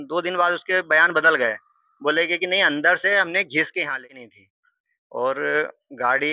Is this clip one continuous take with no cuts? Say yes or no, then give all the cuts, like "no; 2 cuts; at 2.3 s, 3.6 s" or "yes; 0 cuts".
no; 1 cut; at 4.2 s